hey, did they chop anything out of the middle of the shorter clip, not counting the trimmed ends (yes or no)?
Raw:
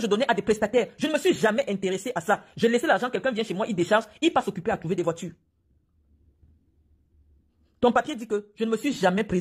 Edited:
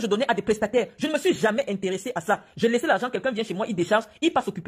no